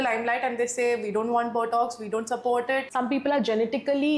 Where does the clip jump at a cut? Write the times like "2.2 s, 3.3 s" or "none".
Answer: 2.9 s